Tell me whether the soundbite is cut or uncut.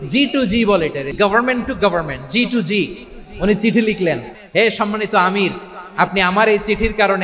cut